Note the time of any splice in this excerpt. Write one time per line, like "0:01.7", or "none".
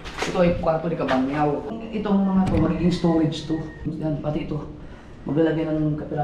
0:01.7
0:03.9